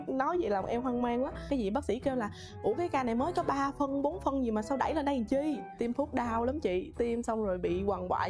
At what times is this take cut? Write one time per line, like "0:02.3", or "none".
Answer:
0:05.7